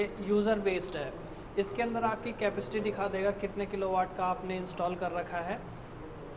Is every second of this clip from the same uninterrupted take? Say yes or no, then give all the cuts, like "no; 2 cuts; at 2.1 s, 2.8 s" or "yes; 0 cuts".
yes; 0 cuts